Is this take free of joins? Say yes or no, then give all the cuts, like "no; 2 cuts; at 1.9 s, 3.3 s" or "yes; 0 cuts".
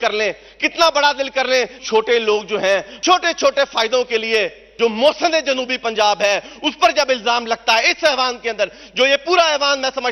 no; 3 cuts; at 1.8 s, 2.9 s, 4.6 s